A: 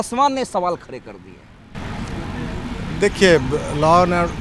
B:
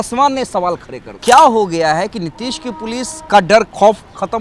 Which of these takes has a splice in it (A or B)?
B